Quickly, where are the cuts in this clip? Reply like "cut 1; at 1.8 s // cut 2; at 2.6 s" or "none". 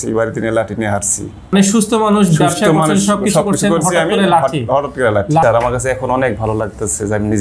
cut 1; at 1.5 s // cut 2; at 5.4 s